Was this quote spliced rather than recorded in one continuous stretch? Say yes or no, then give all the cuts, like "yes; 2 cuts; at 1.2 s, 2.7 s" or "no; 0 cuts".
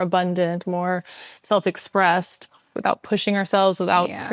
yes; 1 cut; at 2.8 s